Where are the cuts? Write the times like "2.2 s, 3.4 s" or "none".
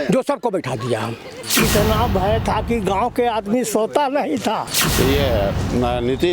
1.3 s, 4.8 s

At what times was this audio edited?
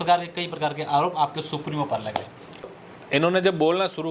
2.6 s

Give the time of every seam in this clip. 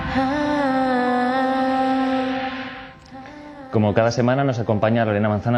4.4 s

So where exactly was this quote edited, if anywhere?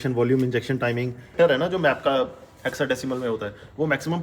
1.3 s

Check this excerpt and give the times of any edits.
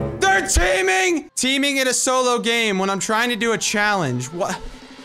1.3 s

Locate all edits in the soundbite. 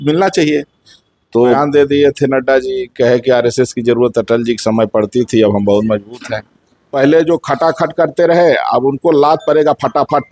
1.6 s, 6.9 s

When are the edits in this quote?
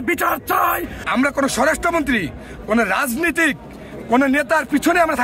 0.9 s

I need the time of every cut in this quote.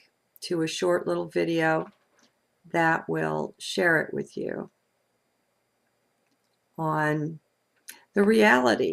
2.6 s

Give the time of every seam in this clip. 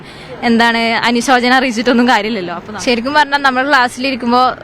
2.5 s

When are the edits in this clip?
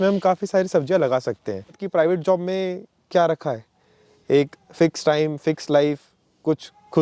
1.8 s

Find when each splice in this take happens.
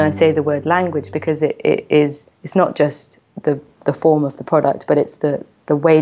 none

